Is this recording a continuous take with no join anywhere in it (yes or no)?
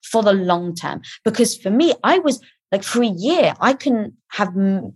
yes